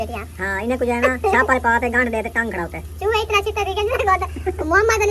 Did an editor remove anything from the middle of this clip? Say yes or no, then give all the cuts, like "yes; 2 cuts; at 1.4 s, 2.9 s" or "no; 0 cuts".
no; 0 cuts